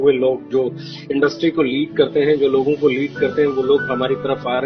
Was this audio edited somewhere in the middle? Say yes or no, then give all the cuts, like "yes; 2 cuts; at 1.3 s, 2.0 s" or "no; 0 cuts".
no; 0 cuts